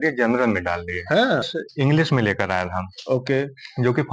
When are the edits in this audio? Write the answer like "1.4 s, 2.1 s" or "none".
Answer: 1.5 s